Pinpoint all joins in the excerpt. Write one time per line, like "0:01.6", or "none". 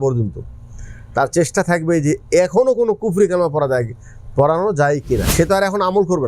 0:05.2